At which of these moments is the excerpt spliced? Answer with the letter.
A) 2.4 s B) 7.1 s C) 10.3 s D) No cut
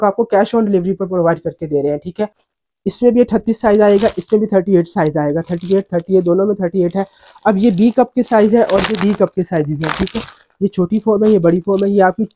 A